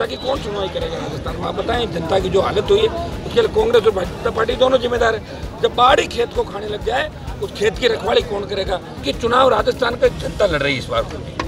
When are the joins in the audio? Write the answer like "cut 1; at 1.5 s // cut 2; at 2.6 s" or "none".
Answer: cut 1; at 9.0 s

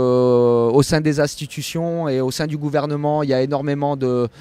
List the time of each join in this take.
none

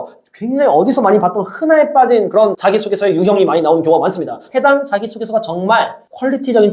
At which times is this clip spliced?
cut 1; at 4.4 s

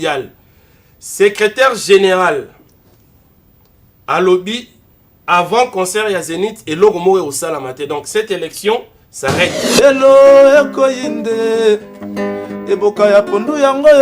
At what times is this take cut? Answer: cut 1; at 9.6 s

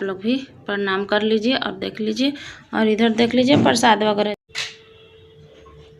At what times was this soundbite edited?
cut 1; at 4.3 s

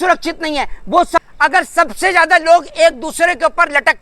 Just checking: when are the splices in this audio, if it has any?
cut 1; at 1.3 s

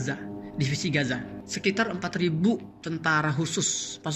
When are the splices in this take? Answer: cut 1; at 1.4 s

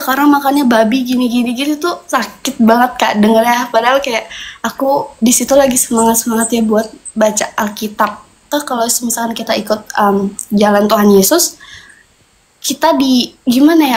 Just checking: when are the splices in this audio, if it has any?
cut 1; at 8.5 s

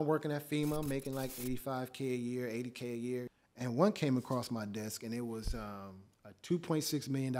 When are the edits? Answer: cut 1; at 3.3 s

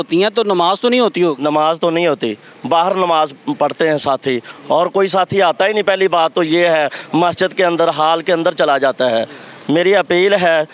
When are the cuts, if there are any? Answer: none

